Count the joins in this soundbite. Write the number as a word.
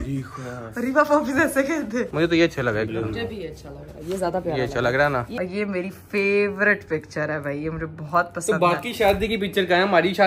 two